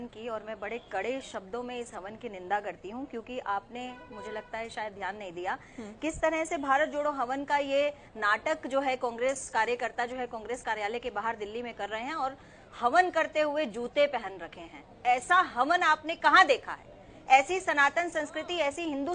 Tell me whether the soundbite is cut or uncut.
uncut